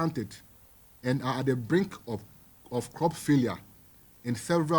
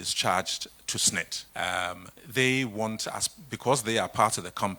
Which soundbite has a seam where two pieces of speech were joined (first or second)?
second